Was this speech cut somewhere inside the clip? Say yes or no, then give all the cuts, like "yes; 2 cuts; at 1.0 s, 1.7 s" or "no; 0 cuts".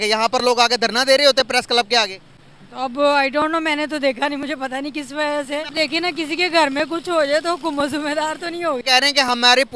yes; 2 cuts; at 5.7 s, 8.8 s